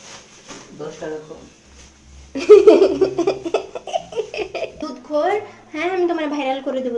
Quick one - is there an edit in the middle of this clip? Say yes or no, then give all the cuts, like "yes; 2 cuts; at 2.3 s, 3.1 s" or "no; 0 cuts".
yes; 1 cut; at 4.8 s